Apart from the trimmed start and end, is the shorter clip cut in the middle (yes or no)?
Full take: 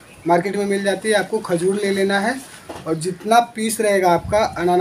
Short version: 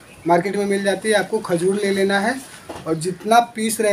no